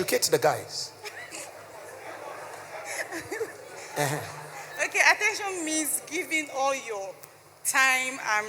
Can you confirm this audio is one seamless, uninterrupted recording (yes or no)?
yes